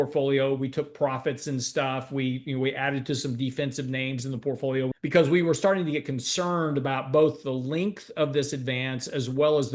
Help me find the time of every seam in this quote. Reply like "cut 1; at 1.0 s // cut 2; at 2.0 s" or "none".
cut 1; at 4.9 s